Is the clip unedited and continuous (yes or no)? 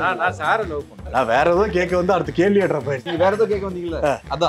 no